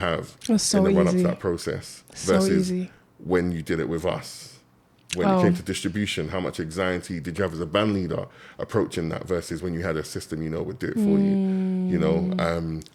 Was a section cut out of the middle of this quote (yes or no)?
no